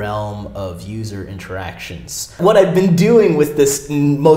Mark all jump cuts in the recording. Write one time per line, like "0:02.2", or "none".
0:02.4